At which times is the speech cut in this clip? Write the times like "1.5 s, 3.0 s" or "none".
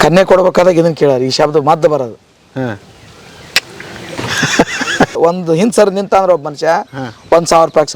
5.2 s